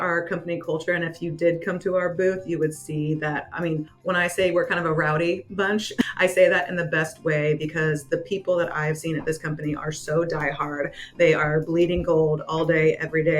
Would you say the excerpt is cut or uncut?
cut